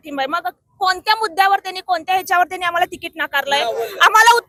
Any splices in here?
no; 0 cuts

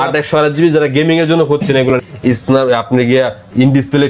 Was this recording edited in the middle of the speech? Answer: yes; 1 cut; at 2.0 s

